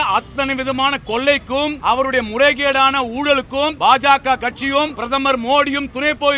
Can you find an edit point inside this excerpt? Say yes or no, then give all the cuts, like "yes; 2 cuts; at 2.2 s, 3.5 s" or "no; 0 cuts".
yes; 3 cuts; at 1.8 s, 3.7 s, 5.0 s